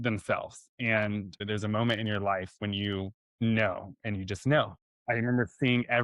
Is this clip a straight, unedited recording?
no; 3 cuts; at 1.4 s, 3.2 s, 4.9 s

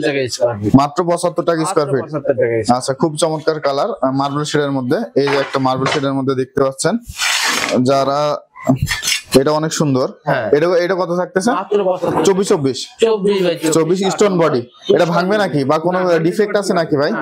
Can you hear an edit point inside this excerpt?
no; 0 cuts

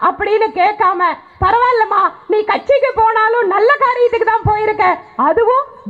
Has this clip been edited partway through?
no; 0 cuts

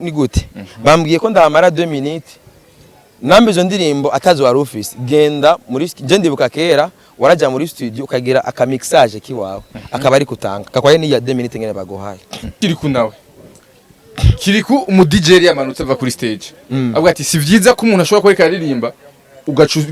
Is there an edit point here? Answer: yes; 1 cut; at 12.6 s

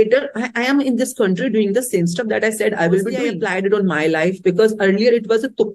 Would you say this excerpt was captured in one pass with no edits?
no; 1 cut; at 3.3 s

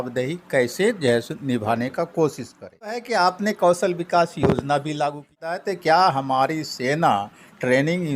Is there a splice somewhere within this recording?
yes; 2 cuts; at 3.0 s, 5.5 s

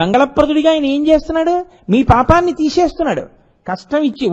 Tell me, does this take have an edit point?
no; 0 cuts

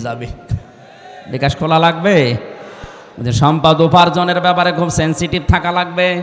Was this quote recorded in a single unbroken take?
yes; 0 cuts

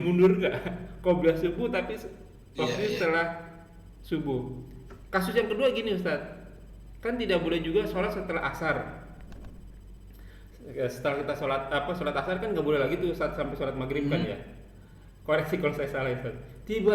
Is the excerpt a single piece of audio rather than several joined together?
yes; 0 cuts

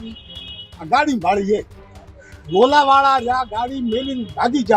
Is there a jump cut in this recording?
no; 0 cuts

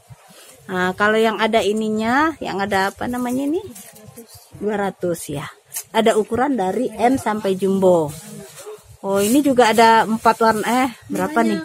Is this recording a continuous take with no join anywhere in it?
yes; 0 cuts

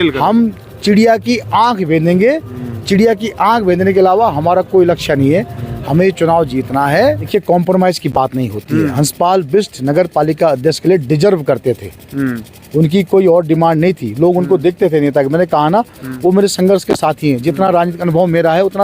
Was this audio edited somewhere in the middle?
yes; 1 cut; at 7.3 s

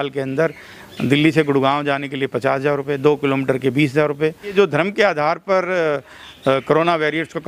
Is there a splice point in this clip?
yes; 1 cut; at 4.5 s

